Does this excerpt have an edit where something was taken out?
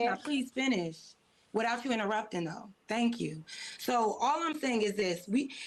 no; 0 cuts

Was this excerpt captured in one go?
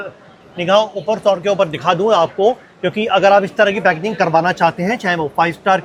yes; 0 cuts

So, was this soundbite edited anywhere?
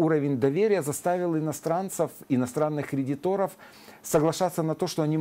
no; 0 cuts

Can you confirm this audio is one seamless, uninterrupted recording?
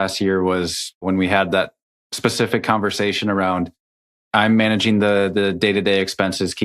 no; 1 cut; at 1.0 s

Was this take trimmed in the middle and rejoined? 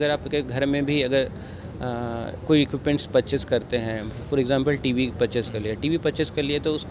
no; 0 cuts

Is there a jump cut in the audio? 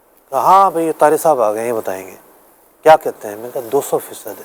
no; 0 cuts

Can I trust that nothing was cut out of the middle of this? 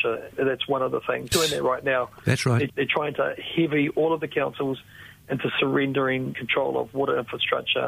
no; 1 cut; at 1.3 s

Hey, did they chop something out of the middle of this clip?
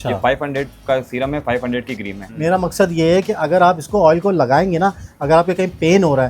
yes; 1 cut; at 2.2 s

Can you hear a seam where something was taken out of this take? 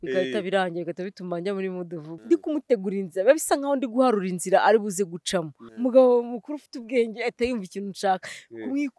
yes; 2 cuts; at 2.1 s, 5.6 s

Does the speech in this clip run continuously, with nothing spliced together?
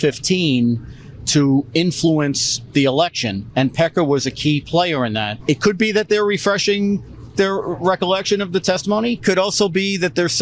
no; 2 cuts; at 5.3 s, 9.2 s

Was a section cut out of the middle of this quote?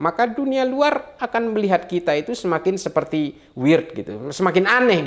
no; 0 cuts

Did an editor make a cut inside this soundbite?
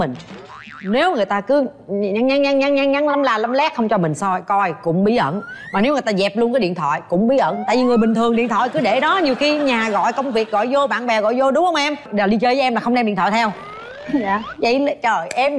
no; 0 cuts

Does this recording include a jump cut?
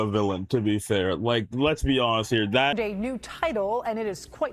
yes; 1 cut; at 2.7 s

